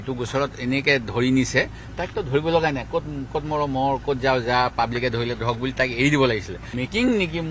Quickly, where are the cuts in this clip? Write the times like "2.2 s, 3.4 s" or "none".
6.6 s